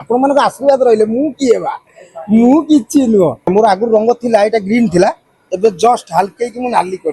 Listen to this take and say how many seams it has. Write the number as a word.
one